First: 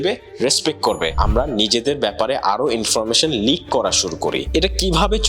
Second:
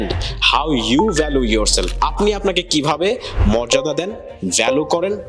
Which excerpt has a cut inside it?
first; 1 cut; at 1.1 s

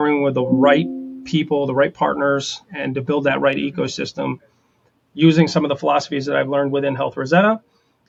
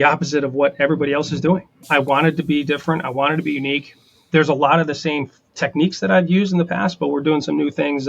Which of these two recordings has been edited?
second; 2 cuts; at 1.8 s, 5.5 s

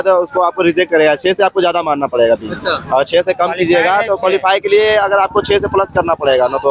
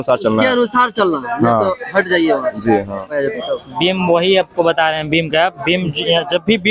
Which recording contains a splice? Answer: second; 1 cut; at 3.2 s

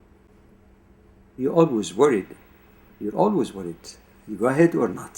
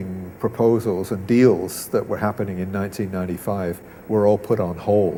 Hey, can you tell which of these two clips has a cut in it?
first; 1 cut; at 1.2 s

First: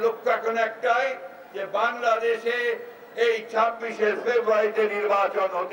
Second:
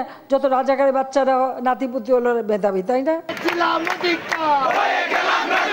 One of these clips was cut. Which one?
second; 1 cut; at 3.3 s

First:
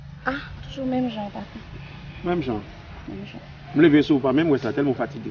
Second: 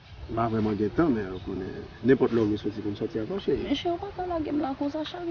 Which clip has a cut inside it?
second; 1 cut; at 3.7 s

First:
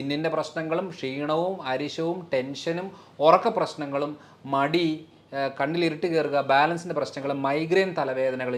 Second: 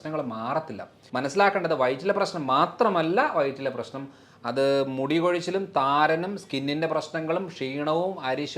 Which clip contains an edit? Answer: second; 1 cut; at 1.0 s

